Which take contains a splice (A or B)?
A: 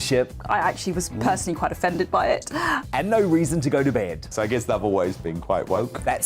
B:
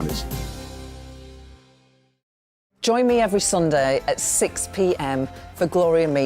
B